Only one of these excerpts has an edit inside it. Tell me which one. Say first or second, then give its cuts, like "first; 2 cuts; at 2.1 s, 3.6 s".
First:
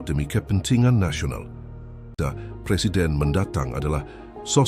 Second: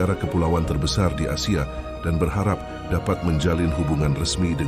first; 1 cut; at 2.1 s